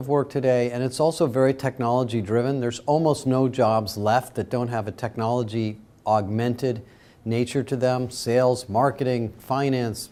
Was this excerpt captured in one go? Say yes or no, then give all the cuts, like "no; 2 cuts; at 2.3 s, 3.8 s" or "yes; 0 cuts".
yes; 0 cuts